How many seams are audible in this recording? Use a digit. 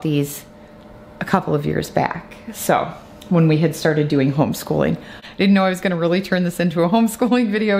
1